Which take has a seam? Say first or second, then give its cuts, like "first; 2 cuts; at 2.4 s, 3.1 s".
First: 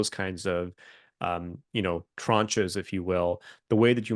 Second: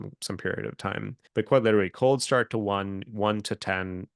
second; 1 cut; at 1.2 s